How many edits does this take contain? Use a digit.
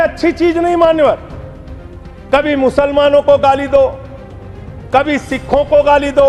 0